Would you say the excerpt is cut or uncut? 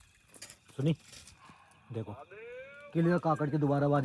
uncut